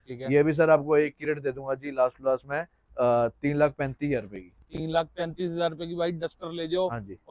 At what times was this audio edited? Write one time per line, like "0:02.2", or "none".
none